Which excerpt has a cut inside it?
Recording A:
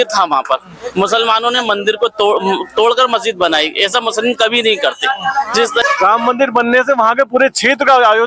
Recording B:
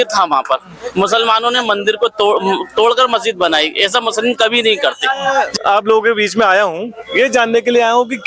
A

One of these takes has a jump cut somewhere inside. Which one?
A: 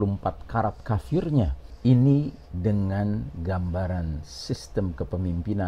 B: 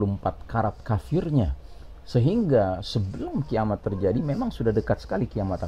A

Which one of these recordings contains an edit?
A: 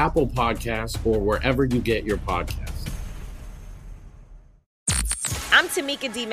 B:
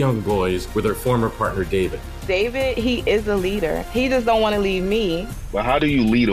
A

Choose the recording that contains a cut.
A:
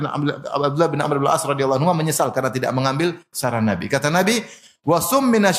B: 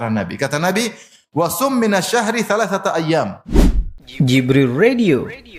B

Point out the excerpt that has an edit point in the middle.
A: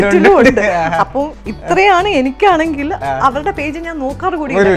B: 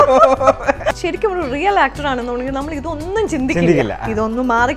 B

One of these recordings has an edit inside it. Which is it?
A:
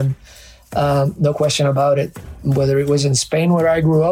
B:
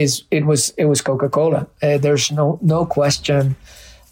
A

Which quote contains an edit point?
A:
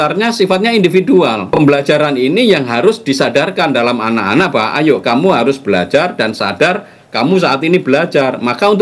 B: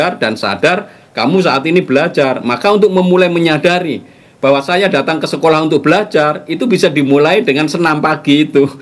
A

